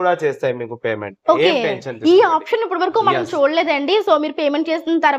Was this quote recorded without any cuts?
yes; 0 cuts

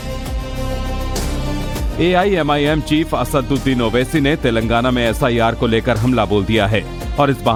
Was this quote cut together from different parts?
no; 0 cuts

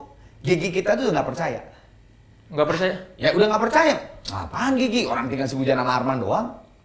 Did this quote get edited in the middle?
no; 0 cuts

